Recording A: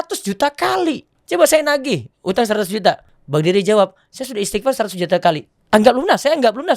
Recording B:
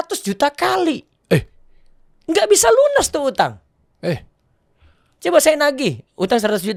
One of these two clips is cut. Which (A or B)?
A